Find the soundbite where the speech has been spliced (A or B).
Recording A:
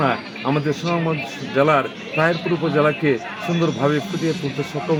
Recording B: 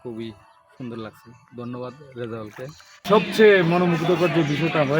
B